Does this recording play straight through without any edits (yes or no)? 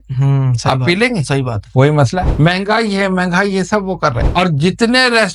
no